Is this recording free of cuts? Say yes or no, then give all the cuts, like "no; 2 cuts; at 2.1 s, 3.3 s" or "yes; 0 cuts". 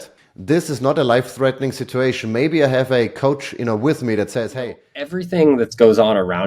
no; 1 cut; at 5.2 s